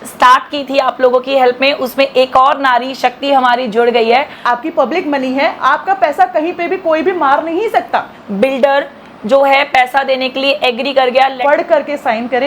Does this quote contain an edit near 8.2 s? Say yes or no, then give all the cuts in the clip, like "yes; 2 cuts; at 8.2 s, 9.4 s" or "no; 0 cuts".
yes; 3 cuts; at 4.3 s, 8.2 s, 11.4 s